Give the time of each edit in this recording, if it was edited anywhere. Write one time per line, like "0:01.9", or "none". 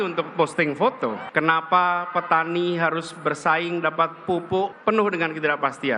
0:01.1
0:04.9